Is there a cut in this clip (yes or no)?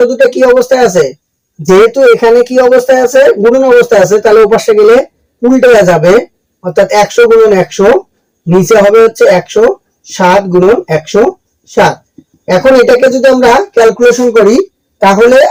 no